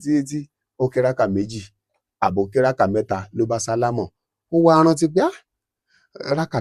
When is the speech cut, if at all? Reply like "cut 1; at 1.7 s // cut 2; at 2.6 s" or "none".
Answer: none